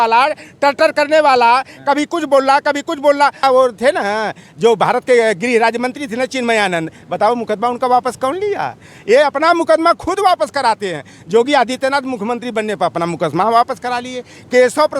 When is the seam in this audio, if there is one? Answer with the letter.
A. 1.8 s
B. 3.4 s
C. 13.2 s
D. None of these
B